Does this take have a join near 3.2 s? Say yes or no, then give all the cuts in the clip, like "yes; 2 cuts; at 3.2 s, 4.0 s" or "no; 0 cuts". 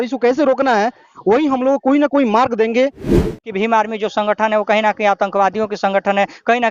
yes; 1 cut; at 3.2 s